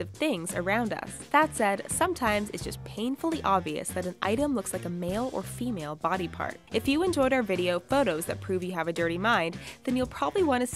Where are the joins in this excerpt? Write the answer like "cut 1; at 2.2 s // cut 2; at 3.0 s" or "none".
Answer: none